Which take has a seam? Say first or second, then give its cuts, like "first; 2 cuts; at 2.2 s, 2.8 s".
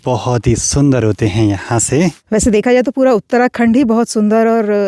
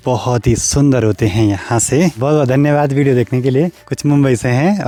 first; 1 cut; at 2.2 s